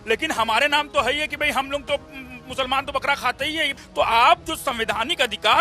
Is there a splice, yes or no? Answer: yes